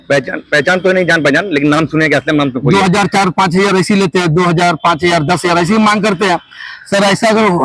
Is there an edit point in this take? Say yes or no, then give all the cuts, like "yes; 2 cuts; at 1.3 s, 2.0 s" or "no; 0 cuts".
yes; 1 cut; at 2.6 s